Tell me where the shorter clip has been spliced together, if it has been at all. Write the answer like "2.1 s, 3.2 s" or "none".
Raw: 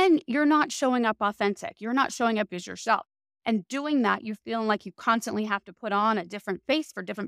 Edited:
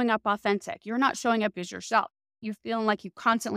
2.4 s